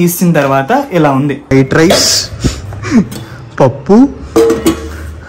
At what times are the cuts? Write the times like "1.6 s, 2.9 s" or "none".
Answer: 1.5 s